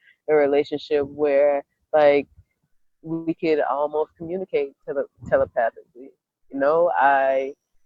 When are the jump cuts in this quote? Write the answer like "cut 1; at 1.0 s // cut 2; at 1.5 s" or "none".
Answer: none